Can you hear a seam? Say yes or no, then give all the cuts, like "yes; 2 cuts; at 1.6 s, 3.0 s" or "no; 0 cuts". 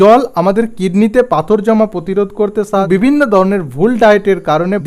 yes; 1 cut; at 2.8 s